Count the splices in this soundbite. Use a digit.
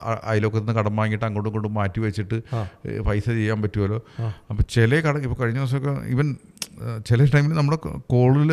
0